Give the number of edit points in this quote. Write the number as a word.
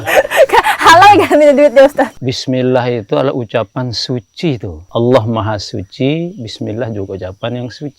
two